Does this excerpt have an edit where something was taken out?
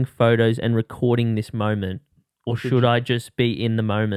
no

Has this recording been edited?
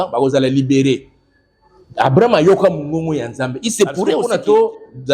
yes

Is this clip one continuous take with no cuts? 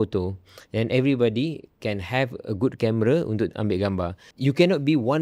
no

